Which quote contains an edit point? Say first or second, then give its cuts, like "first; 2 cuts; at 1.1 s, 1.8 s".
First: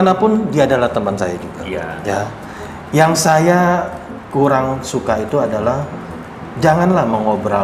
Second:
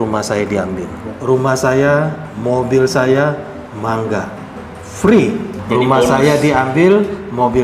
second; 2 cuts; at 1.1 s, 5.5 s